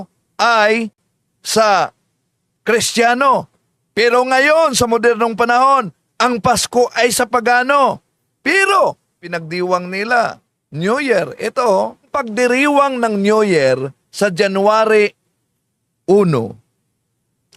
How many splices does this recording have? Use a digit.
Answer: 2